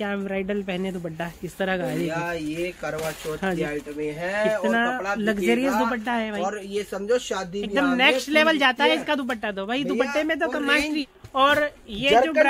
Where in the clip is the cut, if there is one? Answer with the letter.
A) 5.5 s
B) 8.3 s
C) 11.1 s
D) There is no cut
C